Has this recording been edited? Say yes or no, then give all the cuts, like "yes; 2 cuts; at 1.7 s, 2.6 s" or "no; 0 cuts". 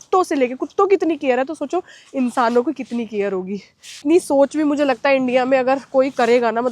yes; 1 cut; at 4.0 s